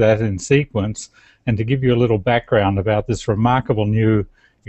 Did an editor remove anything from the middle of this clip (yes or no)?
yes